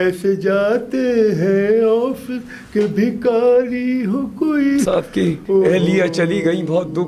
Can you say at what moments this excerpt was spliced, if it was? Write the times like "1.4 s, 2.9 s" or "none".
4.8 s